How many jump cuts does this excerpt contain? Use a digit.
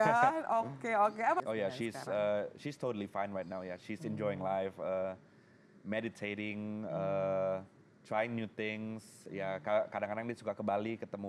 1